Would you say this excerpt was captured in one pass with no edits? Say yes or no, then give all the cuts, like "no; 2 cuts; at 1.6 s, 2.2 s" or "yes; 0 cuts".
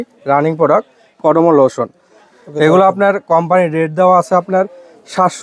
yes; 0 cuts